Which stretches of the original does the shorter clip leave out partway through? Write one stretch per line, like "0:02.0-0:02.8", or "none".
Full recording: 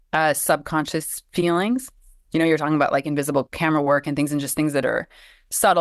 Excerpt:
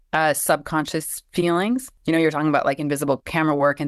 0:01.9-0:02.2